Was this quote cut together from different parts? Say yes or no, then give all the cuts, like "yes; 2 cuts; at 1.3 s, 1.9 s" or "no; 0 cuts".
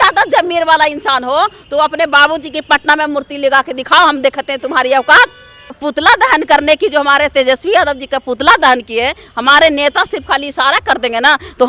yes; 1 cut; at 5.8 s